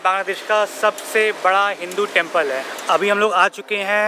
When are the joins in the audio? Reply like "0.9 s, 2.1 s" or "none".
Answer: 2.6 s

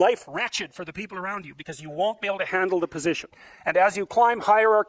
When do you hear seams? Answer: none

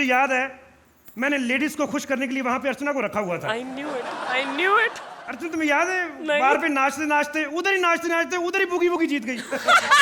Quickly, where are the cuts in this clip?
none

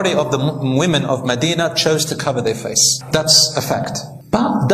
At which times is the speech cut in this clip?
none

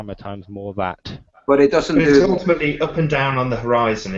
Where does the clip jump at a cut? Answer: none

